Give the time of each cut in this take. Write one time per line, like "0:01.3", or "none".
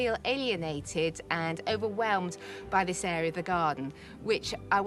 none

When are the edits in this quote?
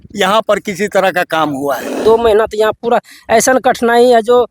0:02.0

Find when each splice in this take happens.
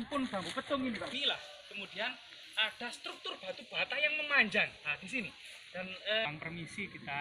0:01.1
0:06.2

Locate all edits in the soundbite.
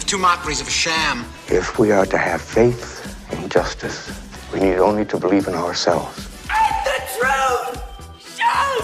none

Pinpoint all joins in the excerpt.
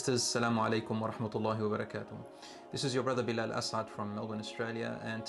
none

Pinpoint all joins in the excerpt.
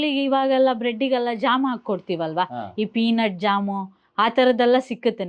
none

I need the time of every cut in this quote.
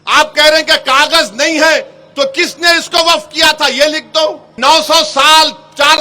0:04.5

